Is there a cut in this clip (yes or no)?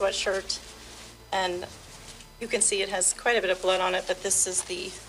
no